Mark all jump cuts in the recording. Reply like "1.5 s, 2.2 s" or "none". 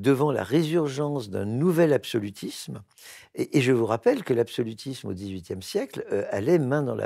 none